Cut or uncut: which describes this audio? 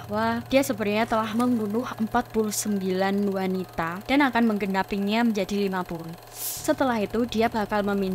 cut